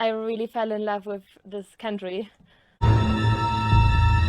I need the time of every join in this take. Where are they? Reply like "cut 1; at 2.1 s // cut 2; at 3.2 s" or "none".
cut 1; at 2.8 s